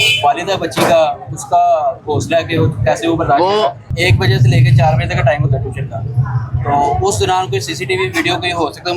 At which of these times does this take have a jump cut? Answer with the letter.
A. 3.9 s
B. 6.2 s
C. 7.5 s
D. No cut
A